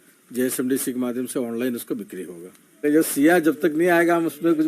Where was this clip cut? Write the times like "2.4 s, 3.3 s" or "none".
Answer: 2.8 s